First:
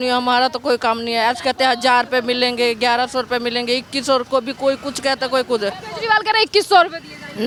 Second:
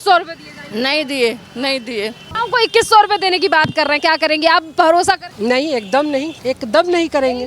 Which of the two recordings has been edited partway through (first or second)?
second